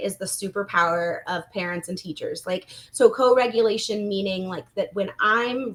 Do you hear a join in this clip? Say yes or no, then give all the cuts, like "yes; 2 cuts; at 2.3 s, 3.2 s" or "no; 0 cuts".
no; 0 cuts